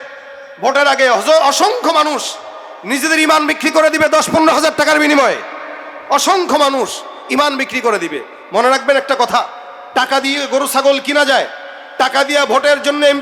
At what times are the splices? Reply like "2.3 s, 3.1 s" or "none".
none